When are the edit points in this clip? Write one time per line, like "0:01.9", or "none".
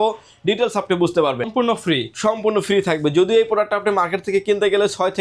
0:01.5